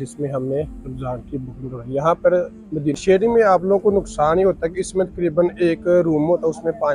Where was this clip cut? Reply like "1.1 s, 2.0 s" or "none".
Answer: 3.0 s